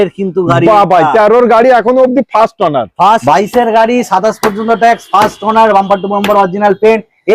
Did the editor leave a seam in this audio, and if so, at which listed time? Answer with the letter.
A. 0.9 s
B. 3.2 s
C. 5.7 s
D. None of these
B